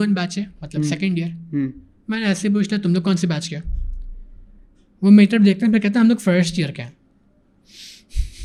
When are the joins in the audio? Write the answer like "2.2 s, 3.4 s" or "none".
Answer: none